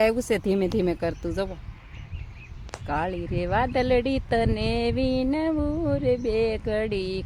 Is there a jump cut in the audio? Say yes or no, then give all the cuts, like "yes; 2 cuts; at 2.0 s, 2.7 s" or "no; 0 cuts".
no; 0 cuts